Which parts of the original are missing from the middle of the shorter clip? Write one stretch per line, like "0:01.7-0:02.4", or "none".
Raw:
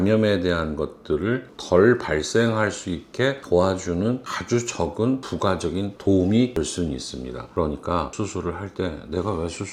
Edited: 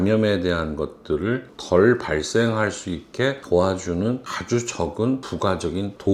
none

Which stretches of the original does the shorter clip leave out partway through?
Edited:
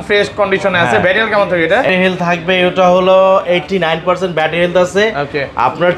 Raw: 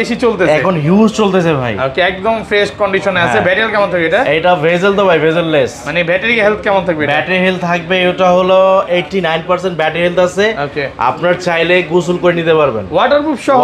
0:04.3-0:07.3

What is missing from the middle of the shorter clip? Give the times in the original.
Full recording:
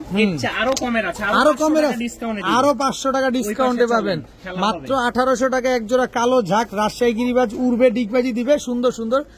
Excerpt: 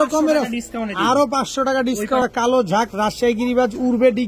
0:03.7-0:06.0

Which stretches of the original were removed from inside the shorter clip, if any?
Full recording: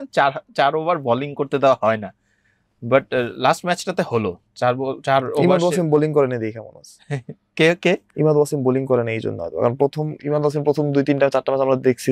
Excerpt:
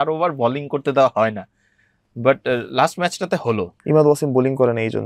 0:04.4-0:08.1

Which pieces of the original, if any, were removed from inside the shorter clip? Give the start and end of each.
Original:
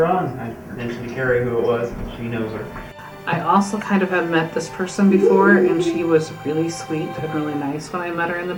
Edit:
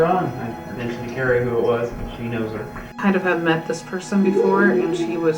0:03.0-0:03.8

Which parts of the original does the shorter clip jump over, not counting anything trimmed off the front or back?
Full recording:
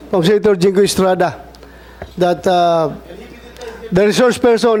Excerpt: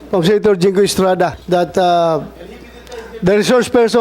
0:01.4-0:02.1

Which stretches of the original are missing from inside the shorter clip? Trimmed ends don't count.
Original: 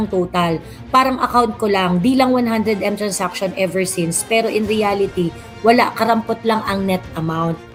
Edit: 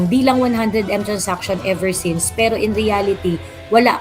none

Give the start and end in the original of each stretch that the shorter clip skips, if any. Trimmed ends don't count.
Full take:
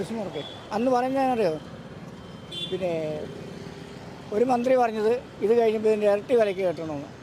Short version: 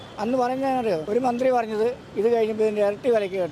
0:01.6-0:04.3

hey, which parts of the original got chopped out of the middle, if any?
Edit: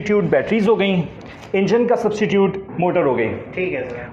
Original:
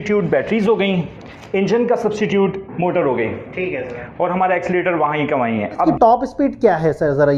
none

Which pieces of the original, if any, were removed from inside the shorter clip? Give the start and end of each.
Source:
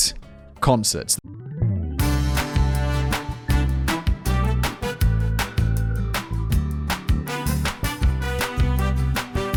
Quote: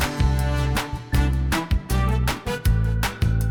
none

